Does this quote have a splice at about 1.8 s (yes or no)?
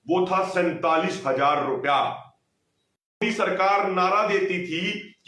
no